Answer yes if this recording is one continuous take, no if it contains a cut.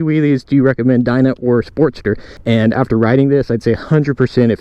no